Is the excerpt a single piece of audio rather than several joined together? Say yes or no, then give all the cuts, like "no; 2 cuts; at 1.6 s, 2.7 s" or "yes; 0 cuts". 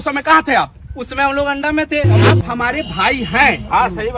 no; 1 cut; at 2.2 s